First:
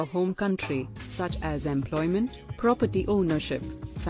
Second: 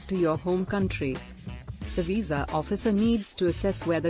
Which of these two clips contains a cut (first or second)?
second